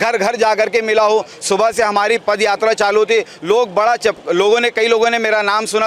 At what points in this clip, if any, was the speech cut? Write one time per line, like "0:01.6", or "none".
none